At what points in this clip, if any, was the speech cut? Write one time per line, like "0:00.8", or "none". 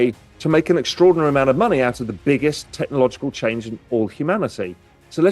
none